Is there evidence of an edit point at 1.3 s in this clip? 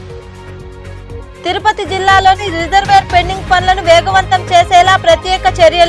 yes; 1 cut; at 1.3 s

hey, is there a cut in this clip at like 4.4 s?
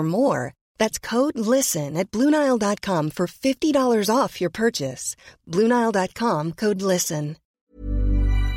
no; 1 cut; at 7.6 s

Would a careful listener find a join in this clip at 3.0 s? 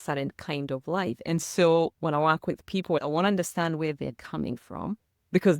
yes; 1 cut; at 3.0 s

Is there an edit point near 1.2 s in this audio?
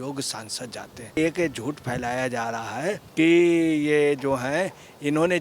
yes; 2 cuts; at 1.2 s, 3.0 s

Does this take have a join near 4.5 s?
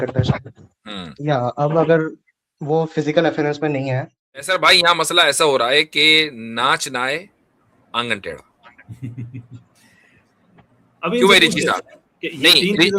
yes; 1 cut; at 4.5 s

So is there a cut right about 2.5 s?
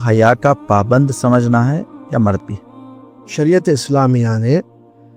no; 0 cuts

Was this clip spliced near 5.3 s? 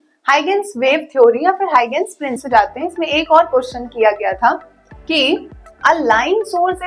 no; 1 cut; at 2.4 s

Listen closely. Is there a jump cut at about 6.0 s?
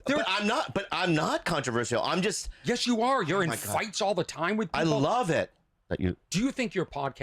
yes; 1 cut; at 6.0 s

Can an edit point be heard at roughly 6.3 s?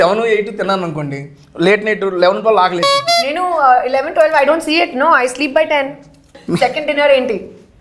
yes; 1 cut; at 6.3 s

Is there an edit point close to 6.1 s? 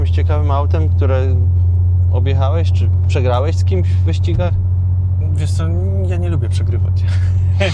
no; 0 cuts

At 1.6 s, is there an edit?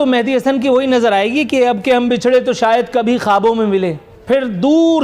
no; 1 cut; at 4.1 s

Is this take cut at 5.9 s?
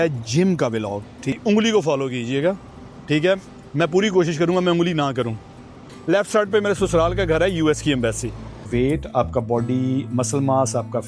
yes; 3 cuts; at 1.3 s, 5.9 s, 8.7 s

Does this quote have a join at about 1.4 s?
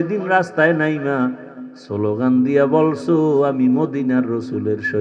no; 0 cuts

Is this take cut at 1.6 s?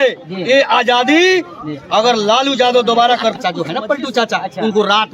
no; 1 cut; at 3.4 s

